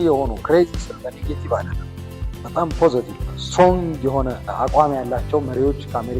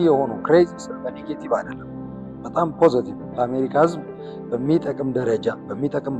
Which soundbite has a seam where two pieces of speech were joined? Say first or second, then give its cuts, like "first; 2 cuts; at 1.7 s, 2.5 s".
first; 2 cuts; at 3.2 s, 4.4 s